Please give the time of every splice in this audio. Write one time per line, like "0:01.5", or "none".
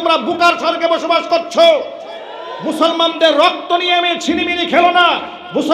none